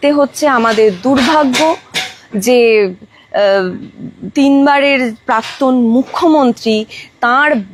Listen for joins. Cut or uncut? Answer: uncut